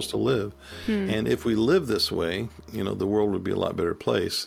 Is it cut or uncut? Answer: uncut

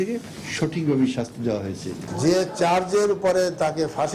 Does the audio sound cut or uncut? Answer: cut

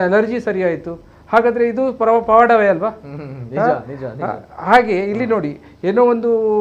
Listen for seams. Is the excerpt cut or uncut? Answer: uncut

